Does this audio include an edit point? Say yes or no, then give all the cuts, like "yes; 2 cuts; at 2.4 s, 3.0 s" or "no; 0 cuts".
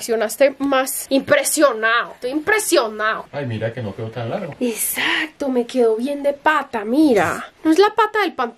yes; 2 cuts; at 3.2 s, 7.4 s